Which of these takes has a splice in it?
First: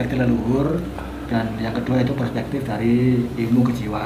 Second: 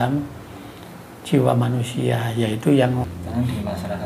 second; 1 cut; at 3.0 s

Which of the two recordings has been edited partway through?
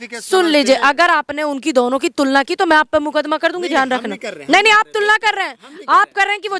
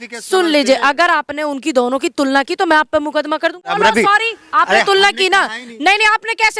second; 1 cut; at 3.7 s

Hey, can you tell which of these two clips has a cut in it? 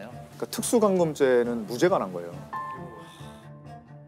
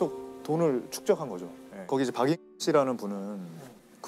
second; 1 cut; at 1.8 s

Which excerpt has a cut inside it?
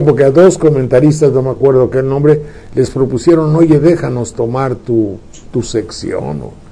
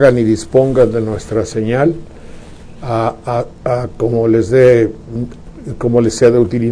first; 1 cut; at 1.9 s

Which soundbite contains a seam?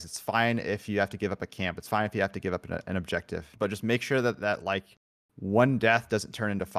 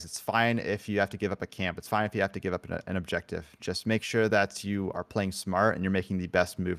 first; 1 cut; at 3.5 s

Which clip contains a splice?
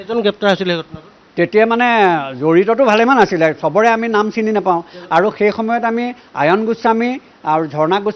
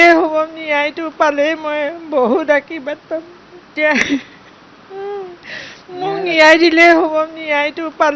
second; 1 cut; at 3.7 s

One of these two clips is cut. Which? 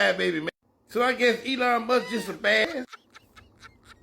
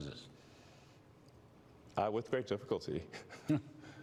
first; 1 cut; at 2.6 s

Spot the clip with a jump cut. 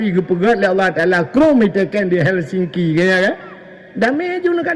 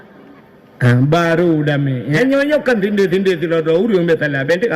second; 1 cut; at 2.1 s

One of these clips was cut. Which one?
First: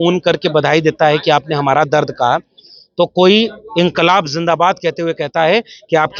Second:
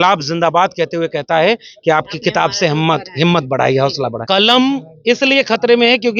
second; 1 cut; at 4.2 s

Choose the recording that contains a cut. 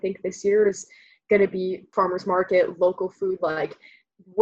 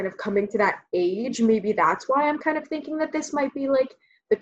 first; 1 cut; at 1.9 s

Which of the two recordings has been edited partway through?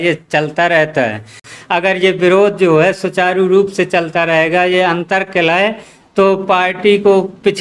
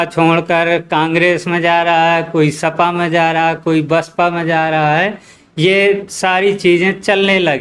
first; 1 cut; at 1.4 s

